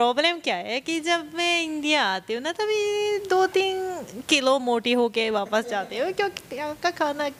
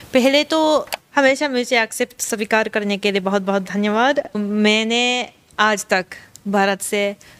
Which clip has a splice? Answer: second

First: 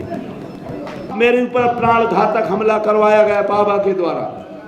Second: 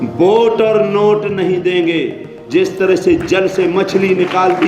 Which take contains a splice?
first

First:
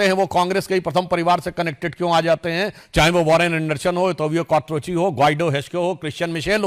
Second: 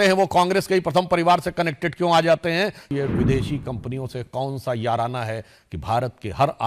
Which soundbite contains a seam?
second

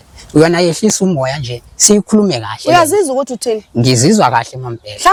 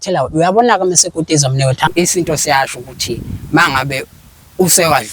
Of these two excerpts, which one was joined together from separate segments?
second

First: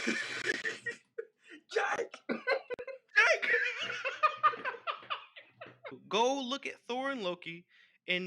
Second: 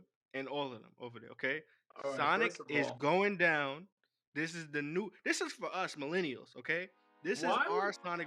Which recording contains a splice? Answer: first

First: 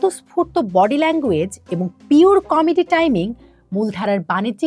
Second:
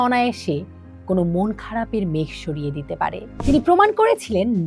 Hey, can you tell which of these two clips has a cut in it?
second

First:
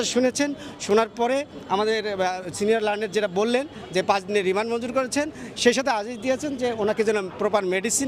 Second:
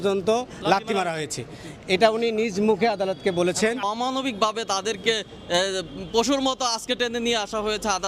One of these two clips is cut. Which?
second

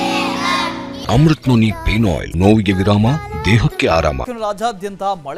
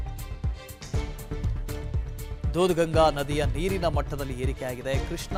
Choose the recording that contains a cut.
first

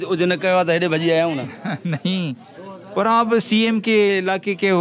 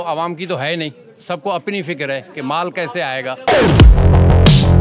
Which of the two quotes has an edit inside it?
second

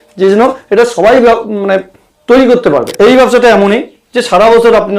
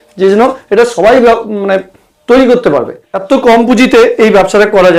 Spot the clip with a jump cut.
first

